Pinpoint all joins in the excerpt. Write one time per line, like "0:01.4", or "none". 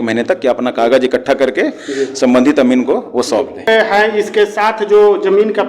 0:03.7